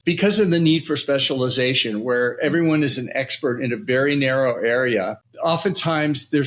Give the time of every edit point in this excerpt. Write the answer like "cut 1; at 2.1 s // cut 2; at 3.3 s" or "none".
none